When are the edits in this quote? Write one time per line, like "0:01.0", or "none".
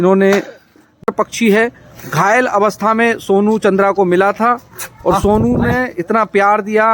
0:01.1